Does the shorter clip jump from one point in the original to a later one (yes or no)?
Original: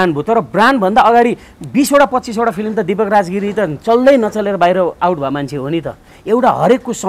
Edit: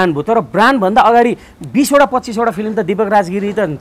no